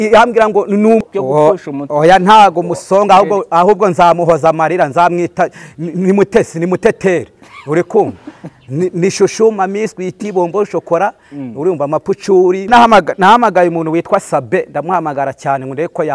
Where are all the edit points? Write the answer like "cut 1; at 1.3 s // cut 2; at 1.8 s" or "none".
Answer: cut 1; at 1.0 s // cut 2; at 12.7 s